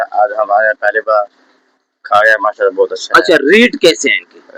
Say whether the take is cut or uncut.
uncut